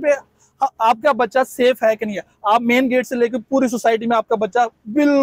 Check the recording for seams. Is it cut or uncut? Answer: uncut